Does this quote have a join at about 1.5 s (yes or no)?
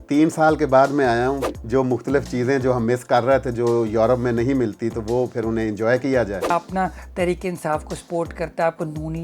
yes